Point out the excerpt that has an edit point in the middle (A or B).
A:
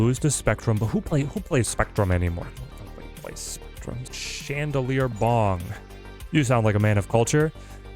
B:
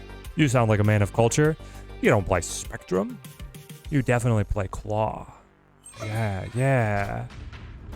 A